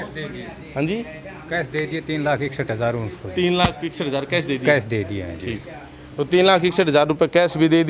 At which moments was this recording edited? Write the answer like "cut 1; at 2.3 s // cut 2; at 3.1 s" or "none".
none